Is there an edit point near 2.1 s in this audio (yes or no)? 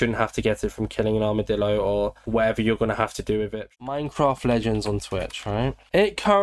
no